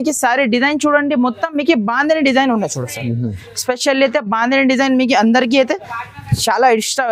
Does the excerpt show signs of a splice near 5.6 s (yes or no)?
no